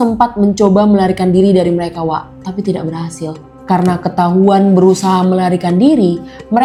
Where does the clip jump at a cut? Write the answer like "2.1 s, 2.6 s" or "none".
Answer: none